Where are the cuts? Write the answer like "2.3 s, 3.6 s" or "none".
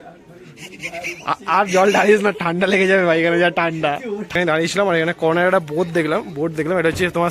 4.3 s